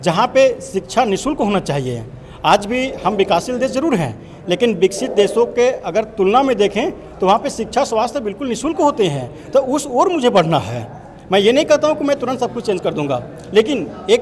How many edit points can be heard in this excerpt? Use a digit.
0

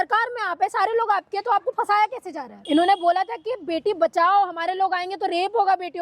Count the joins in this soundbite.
1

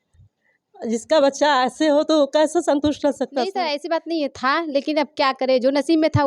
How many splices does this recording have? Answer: 1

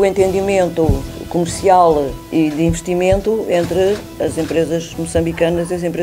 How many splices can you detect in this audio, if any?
0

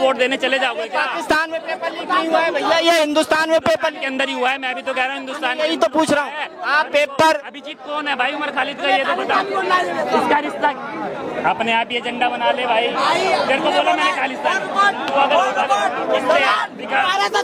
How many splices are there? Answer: 0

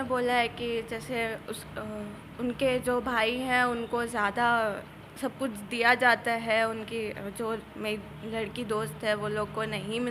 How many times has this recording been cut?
0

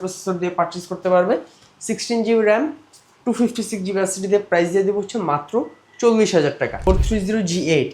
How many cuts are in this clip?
1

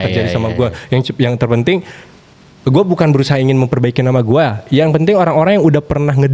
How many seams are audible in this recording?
0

